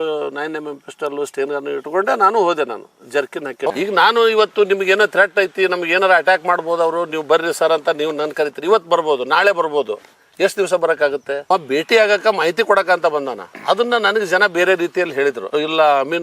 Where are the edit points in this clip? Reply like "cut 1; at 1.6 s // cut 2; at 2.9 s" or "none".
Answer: cut 1; at 3.6 s // cut 2; at 11.5 s